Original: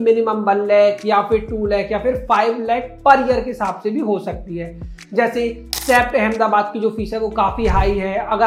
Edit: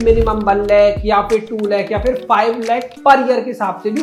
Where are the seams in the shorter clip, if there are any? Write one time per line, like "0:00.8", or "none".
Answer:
none

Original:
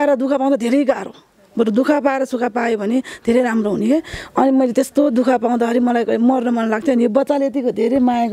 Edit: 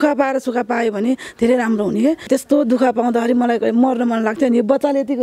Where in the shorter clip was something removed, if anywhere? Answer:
0:02.3

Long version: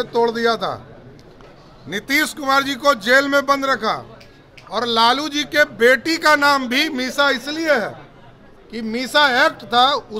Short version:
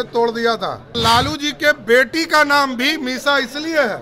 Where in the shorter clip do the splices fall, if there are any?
0:01.0

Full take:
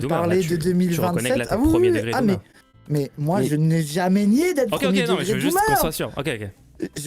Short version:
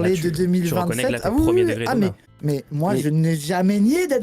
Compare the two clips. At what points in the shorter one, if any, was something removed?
0:02.3

